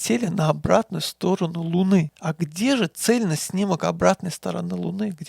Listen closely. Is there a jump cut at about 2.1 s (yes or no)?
yes